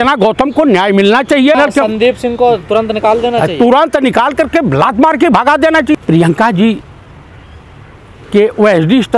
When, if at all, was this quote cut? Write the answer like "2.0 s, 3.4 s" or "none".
1.5 s, 5.9 s